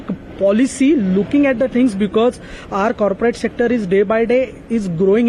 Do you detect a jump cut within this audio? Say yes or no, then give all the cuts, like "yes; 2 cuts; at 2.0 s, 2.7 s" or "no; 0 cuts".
no; 0 cuts